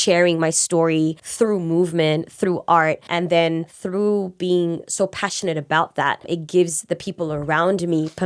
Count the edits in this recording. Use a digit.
3